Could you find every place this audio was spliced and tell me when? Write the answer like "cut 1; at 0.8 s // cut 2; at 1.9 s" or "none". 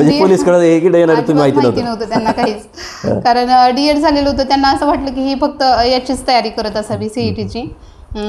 none